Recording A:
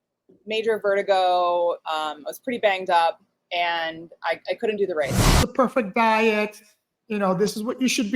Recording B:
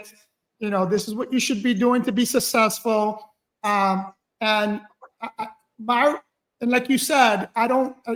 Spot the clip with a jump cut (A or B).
A